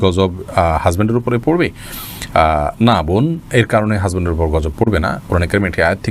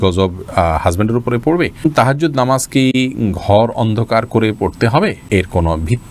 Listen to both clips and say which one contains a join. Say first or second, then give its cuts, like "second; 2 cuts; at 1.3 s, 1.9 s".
second; 2 cuts; at 1.8 s, 5.2 s